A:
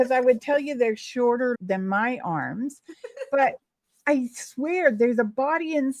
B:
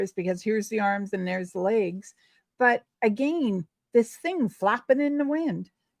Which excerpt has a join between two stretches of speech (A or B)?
A